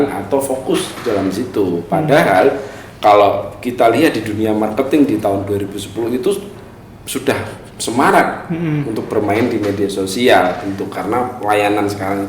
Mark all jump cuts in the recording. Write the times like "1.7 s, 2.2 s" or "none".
10.7 s